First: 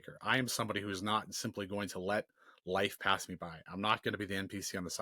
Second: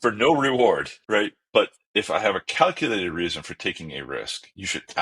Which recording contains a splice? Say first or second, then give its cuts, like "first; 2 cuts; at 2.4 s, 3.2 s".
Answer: second; 1 cut; at 0.9 s